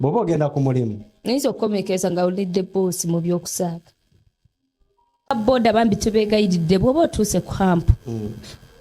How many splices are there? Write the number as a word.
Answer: one